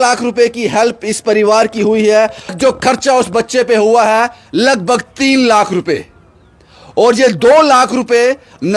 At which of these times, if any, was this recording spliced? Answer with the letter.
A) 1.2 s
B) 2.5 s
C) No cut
B